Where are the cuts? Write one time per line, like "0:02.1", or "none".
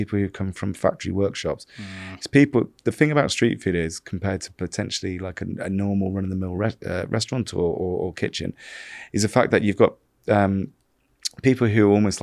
none